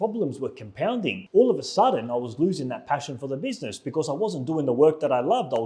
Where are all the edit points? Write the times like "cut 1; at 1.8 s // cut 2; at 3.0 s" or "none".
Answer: cut 1; at 1.2 s